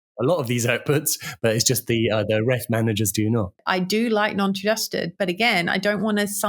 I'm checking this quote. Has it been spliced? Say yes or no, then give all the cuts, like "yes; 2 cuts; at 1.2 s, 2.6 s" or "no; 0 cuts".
yes; 1 cut; at 3.6 s